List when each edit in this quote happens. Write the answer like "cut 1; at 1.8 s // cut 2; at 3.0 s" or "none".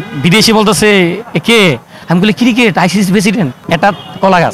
cut 1; at 1.9 s // cut 2; at 3.6 s